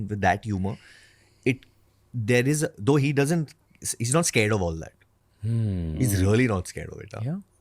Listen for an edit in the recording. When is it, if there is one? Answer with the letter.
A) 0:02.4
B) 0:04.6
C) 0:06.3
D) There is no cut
C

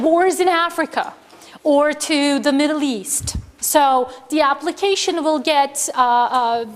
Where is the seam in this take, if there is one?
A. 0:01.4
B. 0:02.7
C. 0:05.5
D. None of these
B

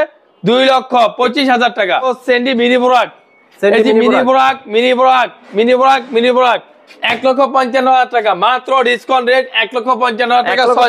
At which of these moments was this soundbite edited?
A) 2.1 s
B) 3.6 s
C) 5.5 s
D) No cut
A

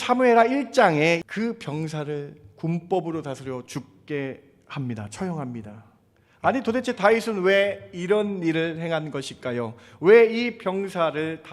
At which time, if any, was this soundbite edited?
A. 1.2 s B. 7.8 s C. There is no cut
A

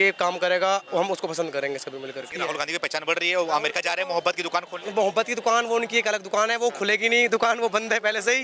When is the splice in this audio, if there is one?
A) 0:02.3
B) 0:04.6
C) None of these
A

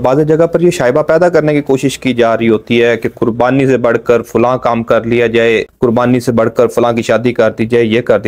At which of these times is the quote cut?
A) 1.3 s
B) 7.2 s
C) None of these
C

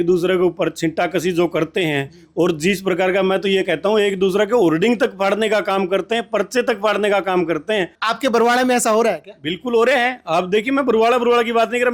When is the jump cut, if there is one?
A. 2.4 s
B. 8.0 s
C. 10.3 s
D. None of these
B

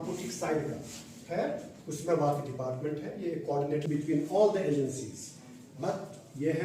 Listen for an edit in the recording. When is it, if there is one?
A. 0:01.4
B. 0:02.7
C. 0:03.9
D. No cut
C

